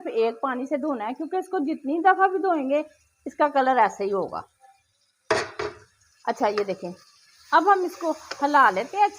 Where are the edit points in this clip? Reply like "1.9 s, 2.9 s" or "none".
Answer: none